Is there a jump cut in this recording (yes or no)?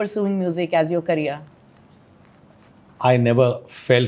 no